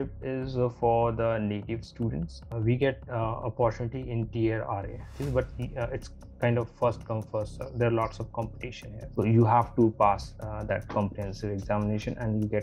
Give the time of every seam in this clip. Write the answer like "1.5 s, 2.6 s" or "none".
2.5 s, 5.1 s, 9.0 s